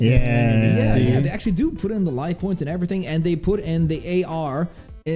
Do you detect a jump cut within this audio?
no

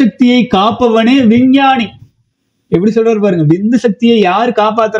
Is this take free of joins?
yes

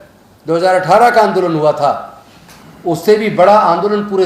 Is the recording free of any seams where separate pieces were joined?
yes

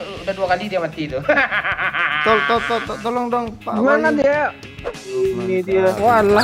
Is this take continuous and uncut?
no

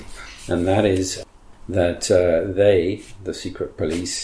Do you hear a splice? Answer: yes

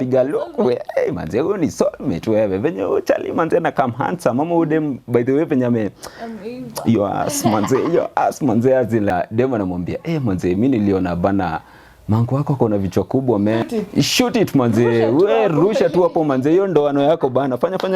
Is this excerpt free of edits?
no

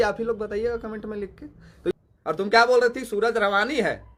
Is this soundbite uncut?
no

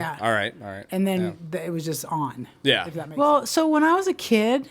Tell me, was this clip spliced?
yes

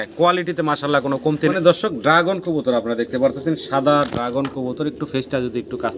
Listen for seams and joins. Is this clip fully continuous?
no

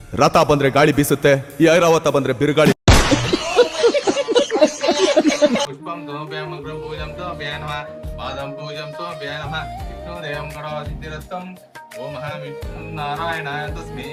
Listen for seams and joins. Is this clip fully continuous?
yes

